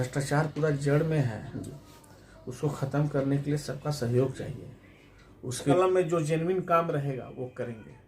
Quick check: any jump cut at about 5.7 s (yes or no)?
yes